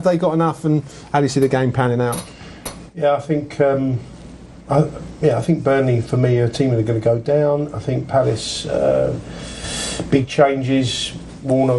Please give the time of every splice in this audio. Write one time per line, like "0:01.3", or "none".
0:08.4